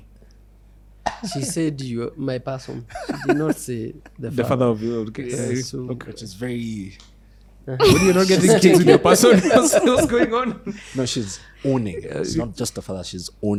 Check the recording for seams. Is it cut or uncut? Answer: uncut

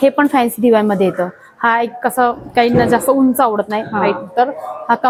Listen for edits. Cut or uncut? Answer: uncut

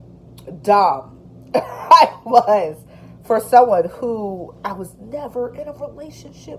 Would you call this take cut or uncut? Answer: uncut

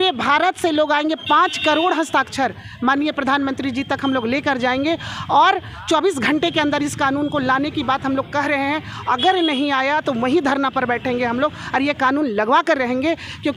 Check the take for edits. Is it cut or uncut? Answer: uncut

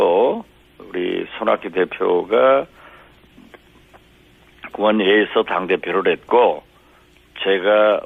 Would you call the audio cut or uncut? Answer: uncut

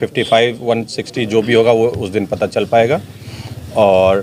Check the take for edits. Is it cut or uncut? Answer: uncut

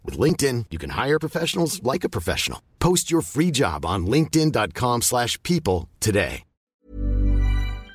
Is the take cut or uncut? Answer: cut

